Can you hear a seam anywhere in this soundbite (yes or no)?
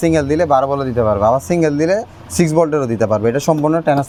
no